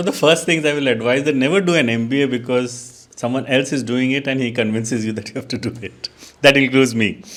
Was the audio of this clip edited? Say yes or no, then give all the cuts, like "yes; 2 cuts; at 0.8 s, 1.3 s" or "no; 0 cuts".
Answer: no; 0 cuts